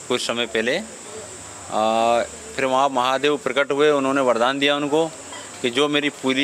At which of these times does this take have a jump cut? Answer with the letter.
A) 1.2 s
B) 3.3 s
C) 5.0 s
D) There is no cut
D